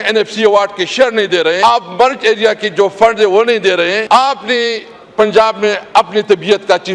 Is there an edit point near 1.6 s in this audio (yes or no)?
yes